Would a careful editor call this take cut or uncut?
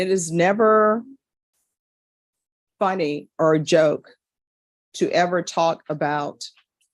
uncut